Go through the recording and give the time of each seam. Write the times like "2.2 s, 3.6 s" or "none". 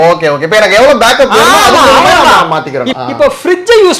2.9 s